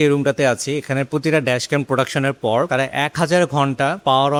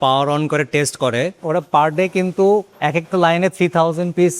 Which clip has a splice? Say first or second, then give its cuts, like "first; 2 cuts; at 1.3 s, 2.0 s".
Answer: second; 1 cut; at 1.3 s